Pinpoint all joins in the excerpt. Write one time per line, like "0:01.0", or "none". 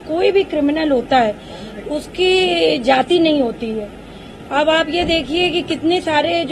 none